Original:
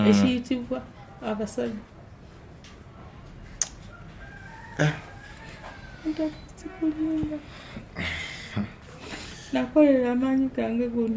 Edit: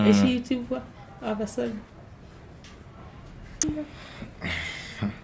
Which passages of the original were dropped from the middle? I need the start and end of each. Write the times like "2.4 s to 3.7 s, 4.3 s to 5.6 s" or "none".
3.6 s to 7.2 s